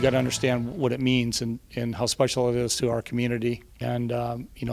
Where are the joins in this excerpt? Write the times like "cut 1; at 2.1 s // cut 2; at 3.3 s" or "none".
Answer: cut 1; at 3.7 s